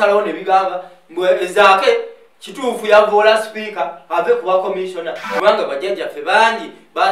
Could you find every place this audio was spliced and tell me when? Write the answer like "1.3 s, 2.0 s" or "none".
5.2 s